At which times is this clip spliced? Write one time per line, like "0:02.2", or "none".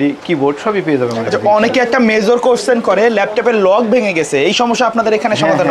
none